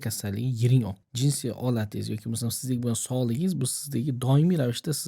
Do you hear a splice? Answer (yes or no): yes